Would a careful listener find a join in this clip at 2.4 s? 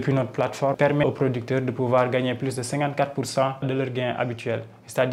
no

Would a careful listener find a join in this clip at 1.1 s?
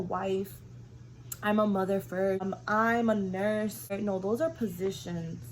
no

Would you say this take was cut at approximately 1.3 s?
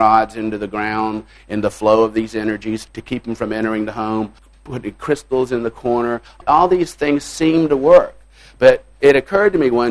no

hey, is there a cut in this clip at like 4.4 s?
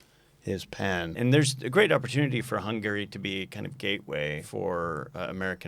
yes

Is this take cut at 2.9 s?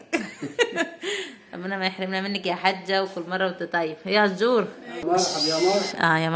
no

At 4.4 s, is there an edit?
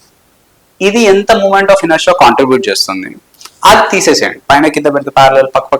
yes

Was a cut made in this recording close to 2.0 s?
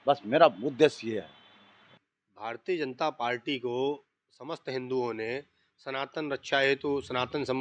yes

